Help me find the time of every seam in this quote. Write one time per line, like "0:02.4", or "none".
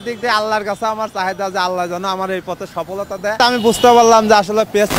0:03.3